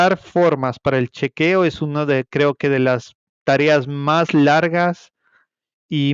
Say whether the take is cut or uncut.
uncut